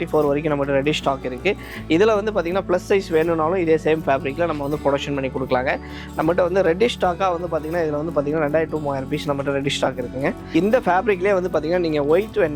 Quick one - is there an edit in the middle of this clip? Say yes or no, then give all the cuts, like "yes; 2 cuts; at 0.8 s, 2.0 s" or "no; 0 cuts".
yes; 1 cut; at 10.4 s